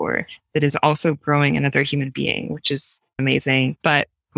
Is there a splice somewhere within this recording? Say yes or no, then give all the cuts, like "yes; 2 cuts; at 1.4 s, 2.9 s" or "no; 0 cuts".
yes; 1 cut; at 3.2 s